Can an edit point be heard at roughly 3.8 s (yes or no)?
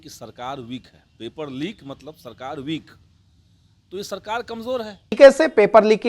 no